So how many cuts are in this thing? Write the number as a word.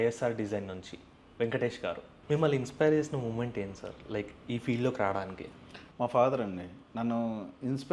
one